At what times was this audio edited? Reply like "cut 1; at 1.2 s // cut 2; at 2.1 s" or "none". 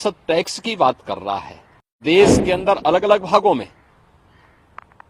cut 1; at 2.0 s